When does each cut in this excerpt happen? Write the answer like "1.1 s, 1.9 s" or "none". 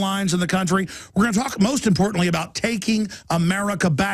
3.1 s